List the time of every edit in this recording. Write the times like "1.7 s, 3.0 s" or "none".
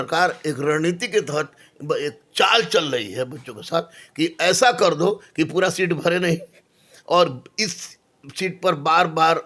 none